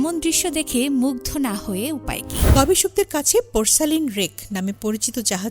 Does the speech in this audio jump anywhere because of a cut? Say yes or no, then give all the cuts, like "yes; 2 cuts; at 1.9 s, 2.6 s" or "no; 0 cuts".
yes; 1 cut; at 2.5 s